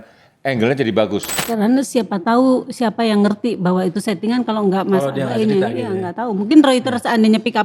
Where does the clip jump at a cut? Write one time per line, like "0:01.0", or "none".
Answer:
0:01.4